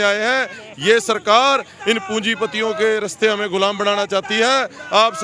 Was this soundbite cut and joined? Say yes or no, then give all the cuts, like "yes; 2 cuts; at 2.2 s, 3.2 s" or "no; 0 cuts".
no; 0 cuts